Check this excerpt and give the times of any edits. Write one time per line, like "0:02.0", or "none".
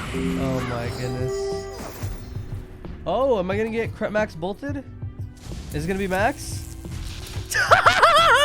0:01.8